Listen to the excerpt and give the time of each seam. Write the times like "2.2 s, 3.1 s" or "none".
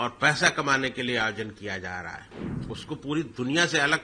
2.3 s